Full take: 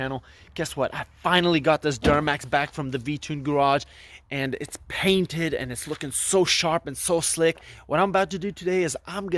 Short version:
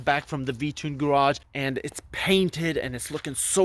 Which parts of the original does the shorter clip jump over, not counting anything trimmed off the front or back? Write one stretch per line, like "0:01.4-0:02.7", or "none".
0:04.0-0:04.3